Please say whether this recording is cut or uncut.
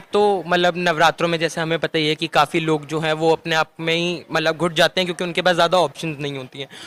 uncut